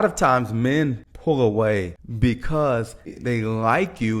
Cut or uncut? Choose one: cut